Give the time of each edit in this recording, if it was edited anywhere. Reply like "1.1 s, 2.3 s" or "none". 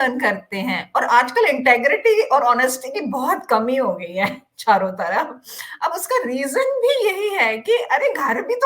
none

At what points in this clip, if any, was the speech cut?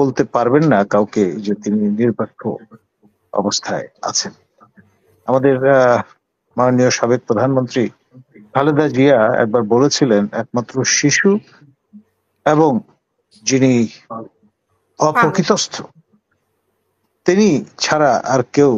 none

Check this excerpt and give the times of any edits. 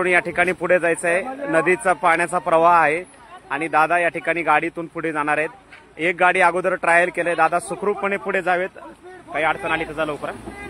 none

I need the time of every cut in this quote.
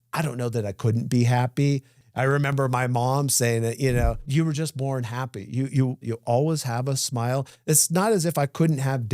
1.9 s, 4.2 s, 6.1 s

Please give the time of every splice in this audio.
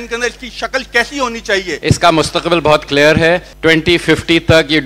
1.7 s, 3.5 s

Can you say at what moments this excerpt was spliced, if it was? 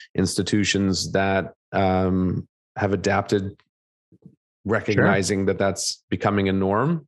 none

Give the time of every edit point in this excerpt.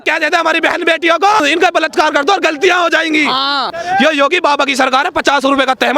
1.4 s, 3.7 s

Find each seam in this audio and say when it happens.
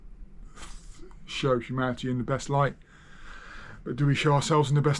none

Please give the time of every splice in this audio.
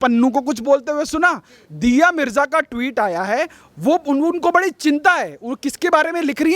none

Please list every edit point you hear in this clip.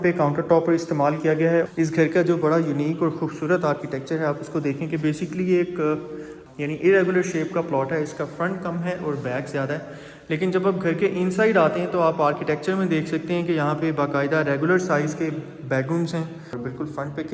1.7 s, 6.4 s, 16.6 s

